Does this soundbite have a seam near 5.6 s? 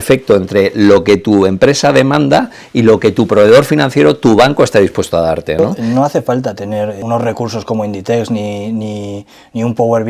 yes; 2 cuts; at 5.6 s, 7.0 s

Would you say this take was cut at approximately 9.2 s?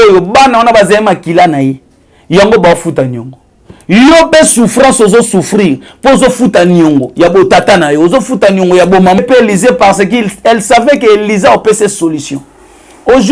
yes; 1 cut; at 9.2 s

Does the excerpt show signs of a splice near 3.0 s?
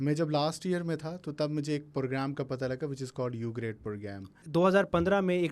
no; 1 cut; at 4.4 s

